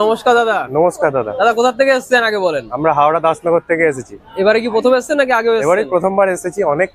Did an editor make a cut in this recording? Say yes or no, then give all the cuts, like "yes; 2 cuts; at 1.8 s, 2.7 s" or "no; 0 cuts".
no; 0 cuts